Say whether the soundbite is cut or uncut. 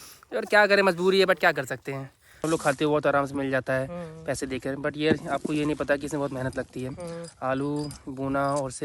cut